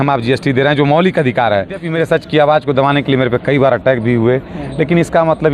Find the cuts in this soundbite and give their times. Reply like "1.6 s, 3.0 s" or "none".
1.9 s